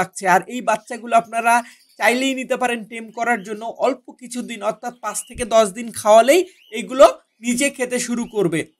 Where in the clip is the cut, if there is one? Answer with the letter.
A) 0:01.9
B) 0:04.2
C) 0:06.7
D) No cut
D